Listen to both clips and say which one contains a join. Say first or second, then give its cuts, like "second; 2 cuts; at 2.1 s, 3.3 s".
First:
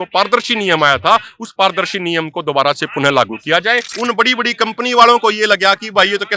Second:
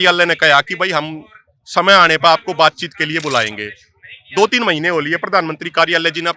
first; 1 cut; at 3.9 s